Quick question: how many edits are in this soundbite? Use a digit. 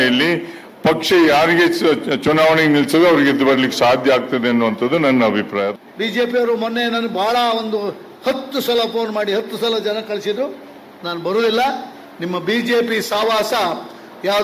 1